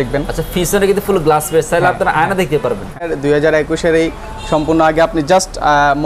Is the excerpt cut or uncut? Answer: cut